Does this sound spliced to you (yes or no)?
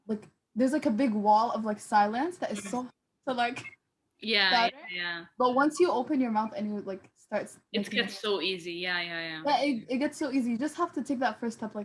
no